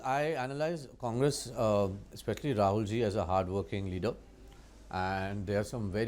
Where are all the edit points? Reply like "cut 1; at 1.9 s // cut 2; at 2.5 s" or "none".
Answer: none